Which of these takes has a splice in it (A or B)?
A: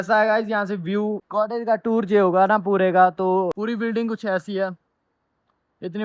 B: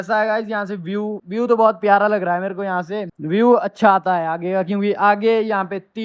A